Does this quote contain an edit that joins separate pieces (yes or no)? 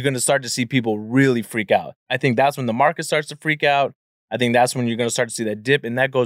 yes